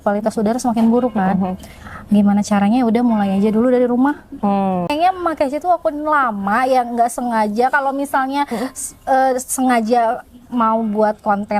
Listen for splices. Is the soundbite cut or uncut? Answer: cut